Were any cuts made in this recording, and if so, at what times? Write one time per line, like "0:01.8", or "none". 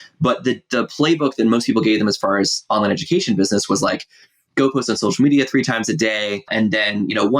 0:06.5